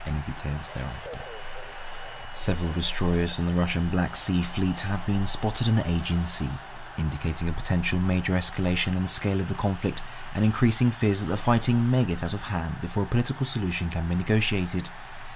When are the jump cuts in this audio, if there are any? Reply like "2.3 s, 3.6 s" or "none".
none